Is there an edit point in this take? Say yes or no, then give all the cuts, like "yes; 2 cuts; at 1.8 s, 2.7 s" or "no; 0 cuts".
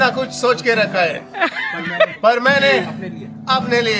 no; 0 cuts